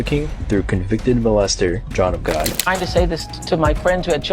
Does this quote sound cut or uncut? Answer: cut